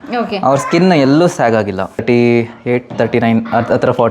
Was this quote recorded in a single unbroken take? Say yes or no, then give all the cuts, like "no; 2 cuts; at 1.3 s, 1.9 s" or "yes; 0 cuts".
no; 1 cut; at 2.0 s